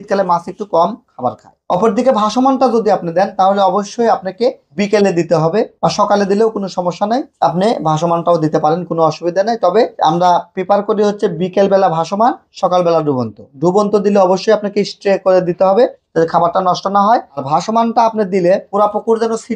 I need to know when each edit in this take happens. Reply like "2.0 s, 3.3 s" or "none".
1.5 s